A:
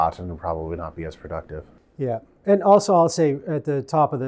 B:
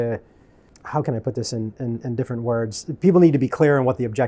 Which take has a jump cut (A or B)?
A